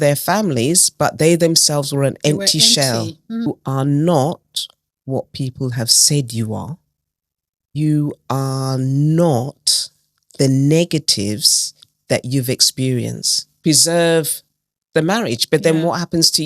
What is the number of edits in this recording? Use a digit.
3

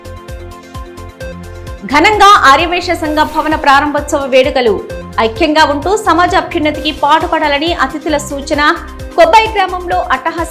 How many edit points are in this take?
1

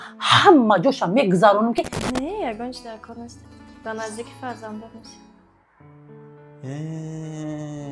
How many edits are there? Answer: 1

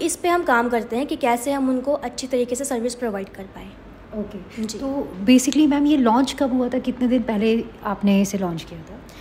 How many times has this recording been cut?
0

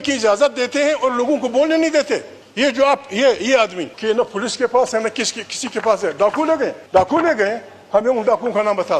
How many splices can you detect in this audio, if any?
3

